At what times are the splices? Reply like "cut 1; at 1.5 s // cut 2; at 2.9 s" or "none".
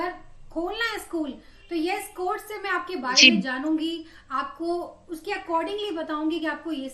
none